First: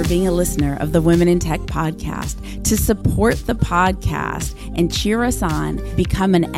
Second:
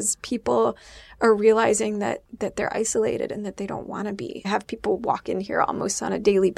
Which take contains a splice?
second; 1 cut; at 4.5 s

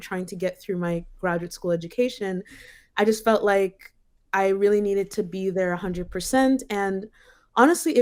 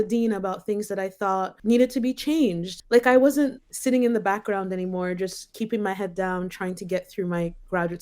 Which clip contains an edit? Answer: second; 3 cuts; at 1.5 s, 2.7 s, 3.7 s

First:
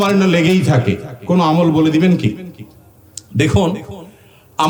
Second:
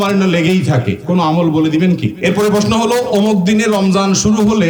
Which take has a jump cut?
second; 2 cuts; at 1.0 s, 2.1 s

